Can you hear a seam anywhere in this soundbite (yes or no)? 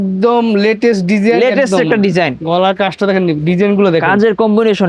no